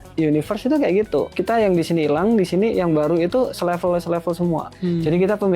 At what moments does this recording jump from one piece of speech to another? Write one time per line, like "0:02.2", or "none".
0:01.3
0:04.7